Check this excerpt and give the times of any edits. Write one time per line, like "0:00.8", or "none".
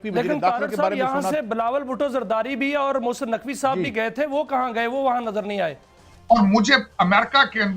0:05.9